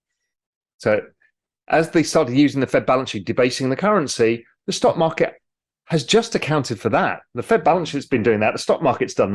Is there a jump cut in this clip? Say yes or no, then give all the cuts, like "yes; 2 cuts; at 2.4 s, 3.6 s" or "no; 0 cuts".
no; 0 cuts